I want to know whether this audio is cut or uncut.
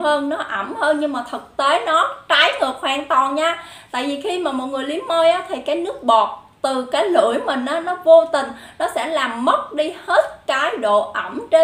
uncut